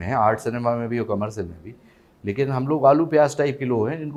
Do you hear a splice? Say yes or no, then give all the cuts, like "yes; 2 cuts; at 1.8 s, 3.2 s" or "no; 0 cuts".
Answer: no; 0 cuts